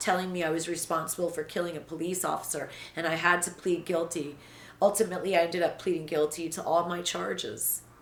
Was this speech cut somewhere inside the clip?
no; 0 cuts

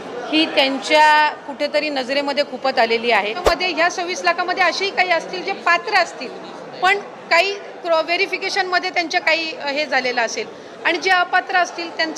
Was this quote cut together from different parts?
yes; 1 cut; at 3.4 s

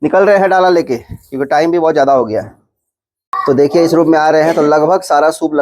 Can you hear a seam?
yes; 1 cut; at 3.4 s

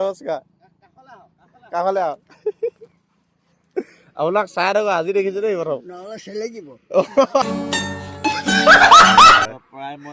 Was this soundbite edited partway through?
yes; 2 cuts; at 7.3 s, 9.4 s

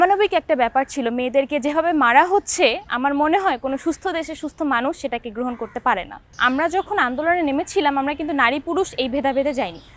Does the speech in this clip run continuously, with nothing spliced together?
yes; 0 cuts

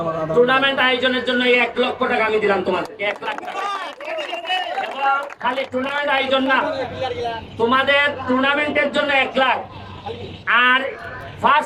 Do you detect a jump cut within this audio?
no; 0 cuts

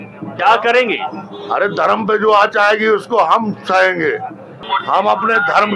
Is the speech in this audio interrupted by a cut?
yes; 1 cut; at 4.7 s

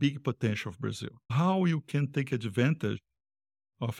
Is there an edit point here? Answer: no; 0 cuts

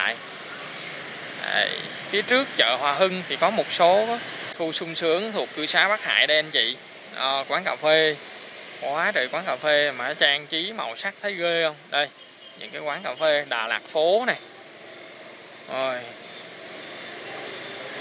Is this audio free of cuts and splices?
no; 1 cut; at 4.5 s

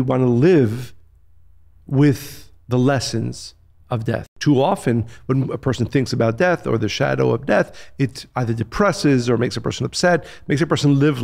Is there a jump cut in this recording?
yes; 1 cut; at 4.3 s

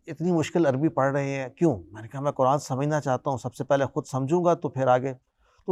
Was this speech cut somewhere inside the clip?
no; 0 cuts

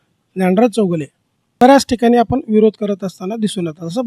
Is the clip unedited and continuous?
no; 1 cut; at 1.6 s

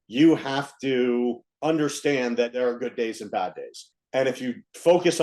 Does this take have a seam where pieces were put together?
yes; 2 cuts; at 2.5 s, 3.9 s

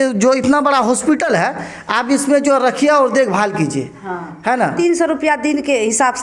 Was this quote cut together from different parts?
yes; 1 cut; at 4.7 s

